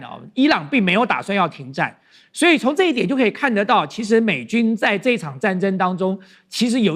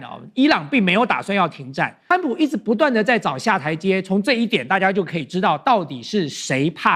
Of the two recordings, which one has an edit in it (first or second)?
second